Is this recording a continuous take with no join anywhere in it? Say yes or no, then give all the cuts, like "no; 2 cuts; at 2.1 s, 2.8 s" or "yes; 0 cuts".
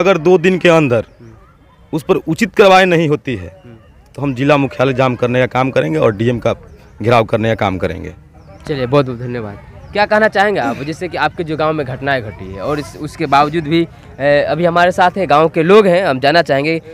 yes; 0 cuts